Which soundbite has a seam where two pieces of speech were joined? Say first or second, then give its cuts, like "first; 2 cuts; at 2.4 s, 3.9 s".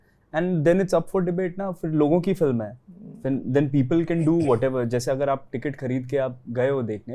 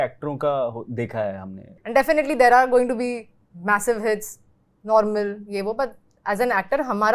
second; 1 cut; at 1.8 s